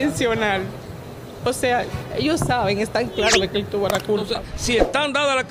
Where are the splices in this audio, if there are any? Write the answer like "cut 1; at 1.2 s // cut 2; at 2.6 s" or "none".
cut 1; at 4.4 s